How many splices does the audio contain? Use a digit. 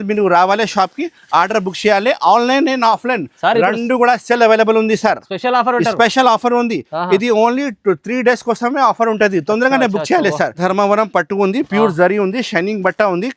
1